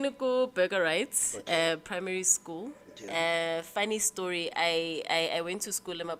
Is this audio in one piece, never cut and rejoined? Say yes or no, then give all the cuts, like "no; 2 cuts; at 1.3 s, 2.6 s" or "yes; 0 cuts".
yes; 0 cuts